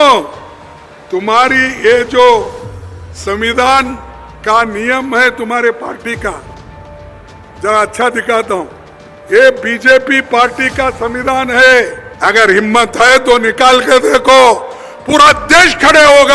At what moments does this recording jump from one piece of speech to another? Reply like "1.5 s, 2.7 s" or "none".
12.0 s